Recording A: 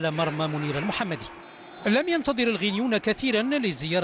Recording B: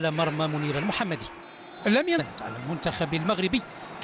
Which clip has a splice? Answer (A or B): A